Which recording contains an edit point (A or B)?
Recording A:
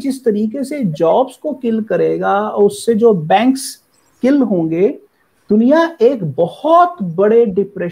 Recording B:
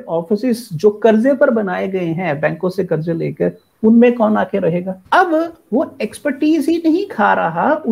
B